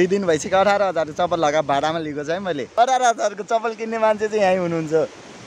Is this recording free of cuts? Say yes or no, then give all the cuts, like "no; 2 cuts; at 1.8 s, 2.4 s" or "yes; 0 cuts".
no; 1 cut; at 2.7 s